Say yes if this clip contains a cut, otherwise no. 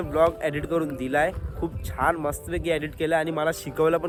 no